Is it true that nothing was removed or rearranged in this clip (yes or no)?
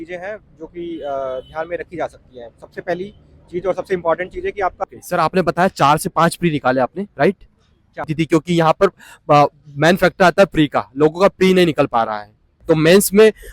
no